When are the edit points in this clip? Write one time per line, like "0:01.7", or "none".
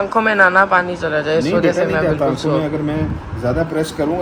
none